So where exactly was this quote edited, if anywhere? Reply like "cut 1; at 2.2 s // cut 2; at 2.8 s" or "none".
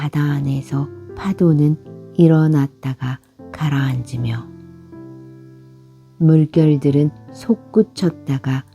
cut 1; at 4.4 s // cut 2; at 5.7 s